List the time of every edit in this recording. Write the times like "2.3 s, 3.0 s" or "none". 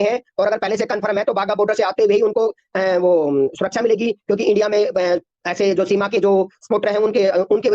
none

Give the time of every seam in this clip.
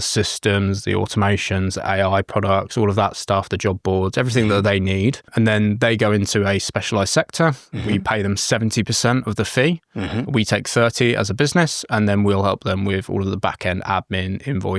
5.3 s

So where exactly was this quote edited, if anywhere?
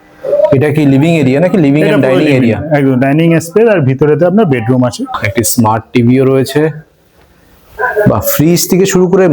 5.2 s

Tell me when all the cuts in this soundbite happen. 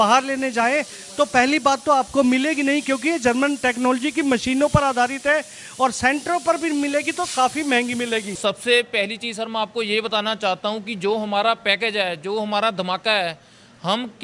8.4 s

